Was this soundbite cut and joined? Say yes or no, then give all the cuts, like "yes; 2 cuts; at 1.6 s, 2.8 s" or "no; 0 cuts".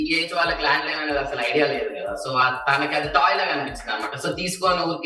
no; 0 cuts